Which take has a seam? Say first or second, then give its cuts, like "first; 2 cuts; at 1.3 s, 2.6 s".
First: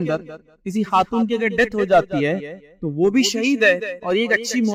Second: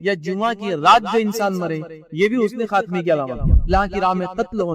second; 1 cut; at 3.7 s